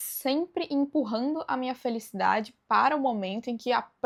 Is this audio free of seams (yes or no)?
yes